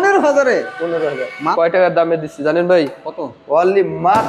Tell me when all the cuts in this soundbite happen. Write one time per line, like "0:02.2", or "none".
0:01.4